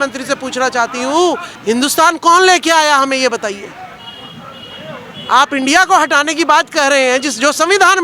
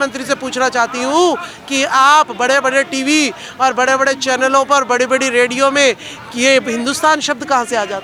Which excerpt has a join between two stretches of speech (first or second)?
first